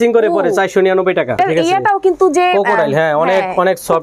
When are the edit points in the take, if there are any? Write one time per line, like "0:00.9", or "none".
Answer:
0:01.4